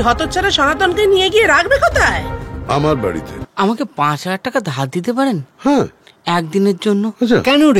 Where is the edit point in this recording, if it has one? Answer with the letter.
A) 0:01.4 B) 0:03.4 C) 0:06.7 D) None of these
B